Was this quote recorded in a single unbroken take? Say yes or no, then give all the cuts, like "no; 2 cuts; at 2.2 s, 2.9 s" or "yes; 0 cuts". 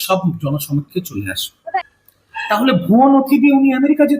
no; 1 cut; at 1.7 s